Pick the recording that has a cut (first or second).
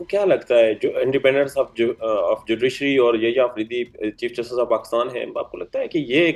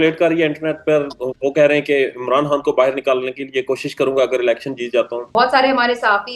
second